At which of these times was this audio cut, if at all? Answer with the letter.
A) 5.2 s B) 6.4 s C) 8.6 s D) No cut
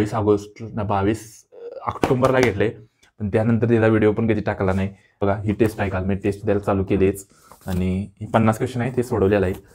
A